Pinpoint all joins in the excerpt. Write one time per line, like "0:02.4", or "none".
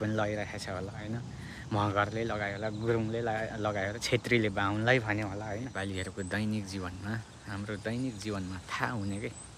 0:05.8